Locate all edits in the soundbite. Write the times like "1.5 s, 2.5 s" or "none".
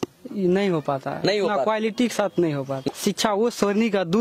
2.8 s